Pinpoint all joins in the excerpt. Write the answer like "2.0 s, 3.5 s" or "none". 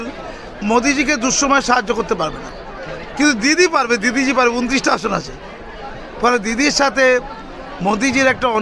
none